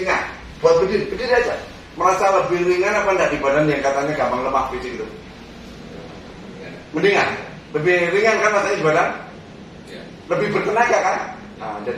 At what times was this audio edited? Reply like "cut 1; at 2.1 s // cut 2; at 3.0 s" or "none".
none